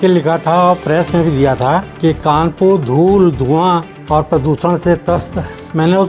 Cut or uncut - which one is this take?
uncut